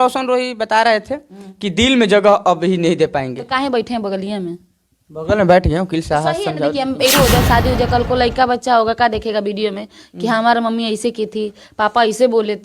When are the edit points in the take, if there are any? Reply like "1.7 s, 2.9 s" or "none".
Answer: 7.1 s

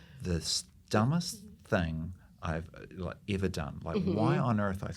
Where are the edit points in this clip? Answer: none

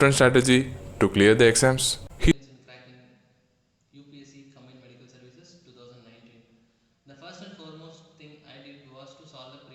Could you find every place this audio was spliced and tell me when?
2.3 s

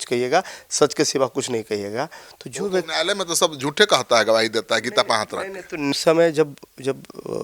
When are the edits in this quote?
5.9 s

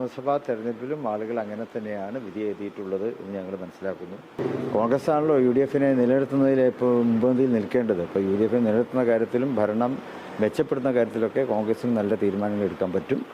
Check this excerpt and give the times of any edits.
4.4 s

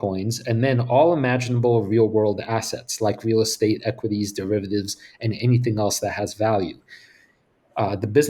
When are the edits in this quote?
none

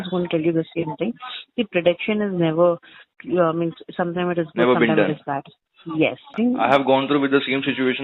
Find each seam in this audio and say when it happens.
6.3 s

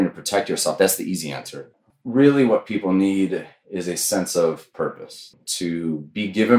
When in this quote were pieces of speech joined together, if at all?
1.8 s, 5.4 s

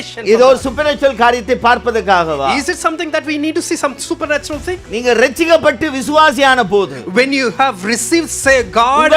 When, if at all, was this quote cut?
4.9 s

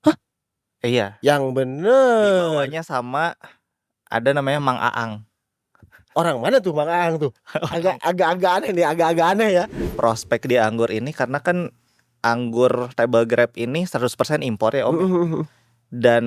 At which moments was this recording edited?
9.9 s

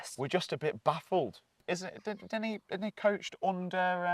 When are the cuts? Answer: 1.6 s

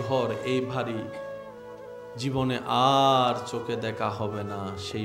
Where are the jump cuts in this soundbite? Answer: none

